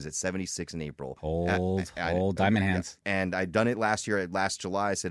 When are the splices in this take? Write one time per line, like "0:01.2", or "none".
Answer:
0:01.1
0:03.0